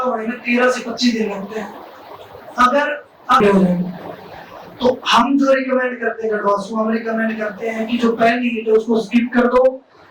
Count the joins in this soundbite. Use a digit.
1